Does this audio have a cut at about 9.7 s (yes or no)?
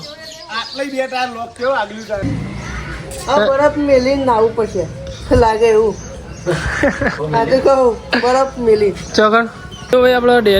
yes